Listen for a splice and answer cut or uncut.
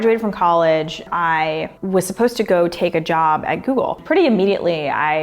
cut